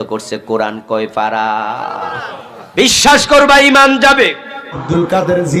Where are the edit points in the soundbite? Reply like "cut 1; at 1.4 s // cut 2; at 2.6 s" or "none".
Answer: cut 1; at 4.7 s

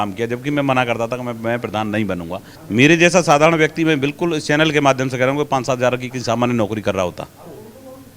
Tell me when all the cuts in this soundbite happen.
cut 1; at 2.6 s

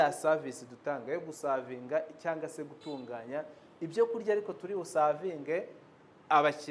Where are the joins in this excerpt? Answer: none

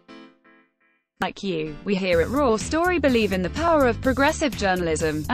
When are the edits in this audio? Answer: cut 1; at 1.2 s

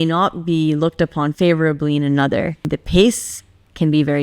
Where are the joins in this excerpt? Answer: cut 1; at 1.3 s // cut 2; at 2.7 s

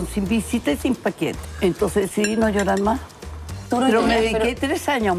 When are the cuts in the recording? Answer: cut 1; at 1.4 s // cut 2; at 3.7 s

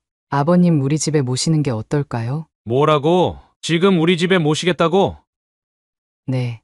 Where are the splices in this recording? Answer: cut 1; at 3.5 s

